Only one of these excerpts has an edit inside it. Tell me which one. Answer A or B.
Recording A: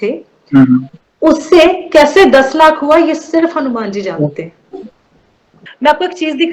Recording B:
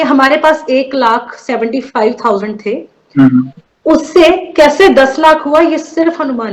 A